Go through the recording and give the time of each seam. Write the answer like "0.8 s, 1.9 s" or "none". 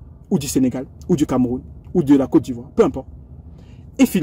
none